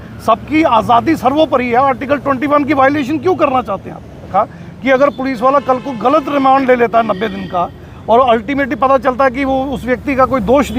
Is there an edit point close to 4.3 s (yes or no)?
yes